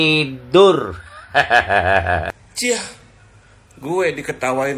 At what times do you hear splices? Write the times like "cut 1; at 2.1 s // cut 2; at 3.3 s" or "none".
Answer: cut 1; at 2.5 s